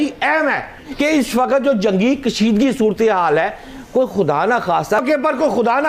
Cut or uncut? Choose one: cut